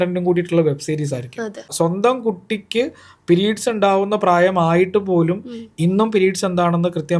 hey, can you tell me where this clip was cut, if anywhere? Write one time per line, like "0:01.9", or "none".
0:01.7